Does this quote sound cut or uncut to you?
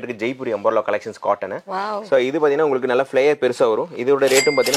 uncut